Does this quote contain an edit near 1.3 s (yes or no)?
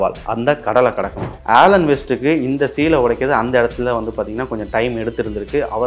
yes